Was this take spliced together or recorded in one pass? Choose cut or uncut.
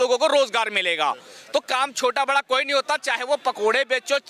uncut